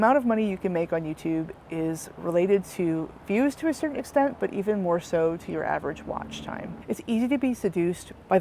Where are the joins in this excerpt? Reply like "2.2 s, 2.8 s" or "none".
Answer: 6.7 s